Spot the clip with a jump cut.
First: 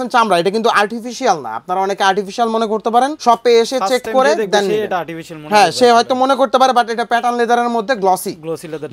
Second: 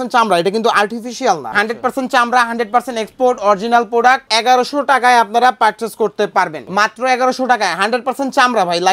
second; 3 cuts; at 1.5 s, 4.3 s, 6.6 s

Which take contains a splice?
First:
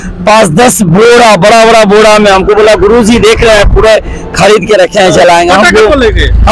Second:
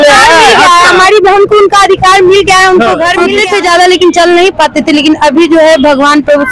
second; 1 cut; at 3.3 s

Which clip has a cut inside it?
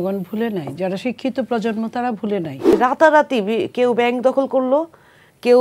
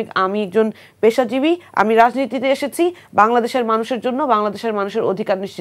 first; 1 cut; at 2.7 s

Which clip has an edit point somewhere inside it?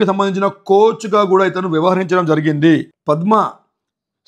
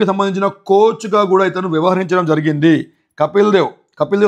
first; 1 cut; at 2.9 s

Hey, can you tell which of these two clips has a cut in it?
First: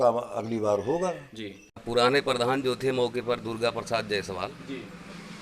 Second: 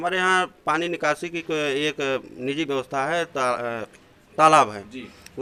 first; 1 cut; at 1.8 s

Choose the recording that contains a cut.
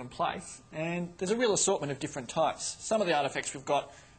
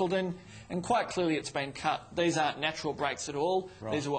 first; 1 cut; at 2.7 s

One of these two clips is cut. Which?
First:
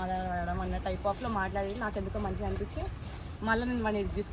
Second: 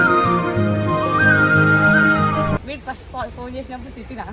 second; 1 cut; at 2.6 s

